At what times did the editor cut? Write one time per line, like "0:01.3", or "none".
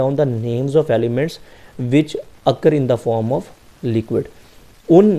none